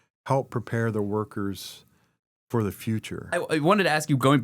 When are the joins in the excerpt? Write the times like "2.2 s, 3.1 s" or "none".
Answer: 3.3 s